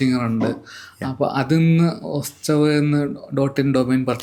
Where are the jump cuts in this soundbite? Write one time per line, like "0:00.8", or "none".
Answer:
none